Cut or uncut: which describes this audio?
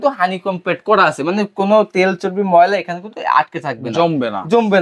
uncut